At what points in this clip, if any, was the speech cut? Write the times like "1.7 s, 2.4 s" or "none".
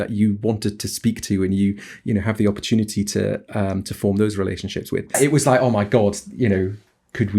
5.2 s